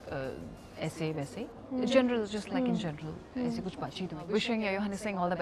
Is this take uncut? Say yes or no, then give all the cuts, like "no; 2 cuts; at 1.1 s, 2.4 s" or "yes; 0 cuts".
no; 1 cut; at 4.2 s